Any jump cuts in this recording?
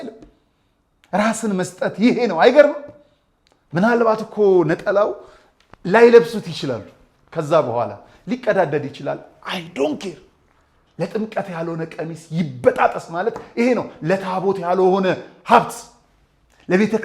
no; 0 cuts

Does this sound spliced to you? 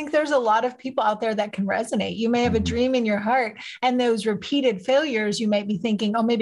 no; 0 cuts

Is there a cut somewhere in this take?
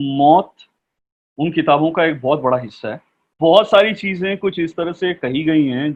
no; 0 cuts

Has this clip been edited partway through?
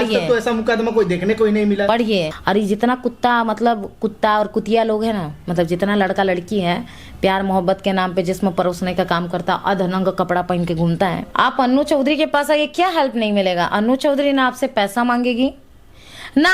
yes; 2 cuts; at 2.4 s, 11.2 s

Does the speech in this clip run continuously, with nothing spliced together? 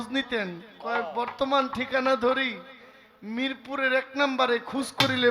yes; 0 cuts

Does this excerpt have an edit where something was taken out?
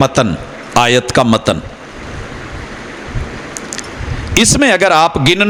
no; 0 cuts

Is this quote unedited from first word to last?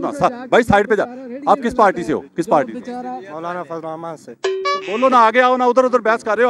yes; 0 cuts

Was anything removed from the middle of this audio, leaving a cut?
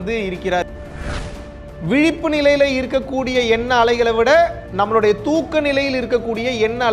yes; 2 cuts; at 1.3 s, 4.6 s

